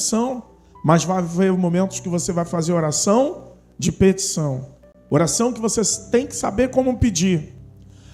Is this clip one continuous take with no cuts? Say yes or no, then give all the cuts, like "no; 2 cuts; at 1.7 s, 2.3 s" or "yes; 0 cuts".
yes; 0 cuts